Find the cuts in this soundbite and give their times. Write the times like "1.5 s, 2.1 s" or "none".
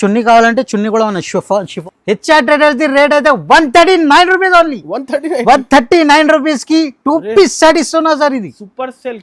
1.8 s